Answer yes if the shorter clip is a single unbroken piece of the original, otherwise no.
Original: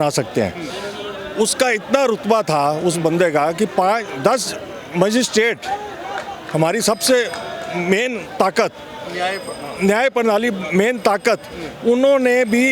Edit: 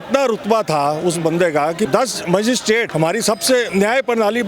no